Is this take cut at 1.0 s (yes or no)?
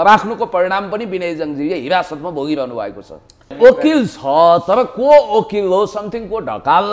no